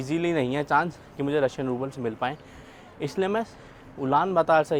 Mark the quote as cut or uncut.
uncut